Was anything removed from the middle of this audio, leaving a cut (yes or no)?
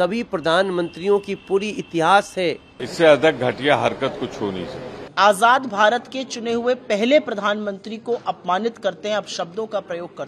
yes